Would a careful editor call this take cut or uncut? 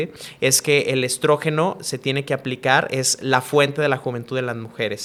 uncut